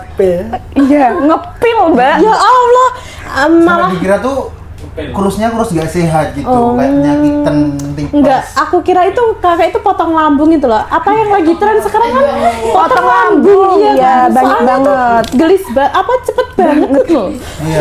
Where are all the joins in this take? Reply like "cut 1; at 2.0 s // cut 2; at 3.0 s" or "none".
none